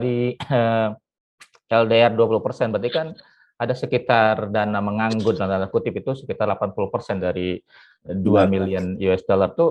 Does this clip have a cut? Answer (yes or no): no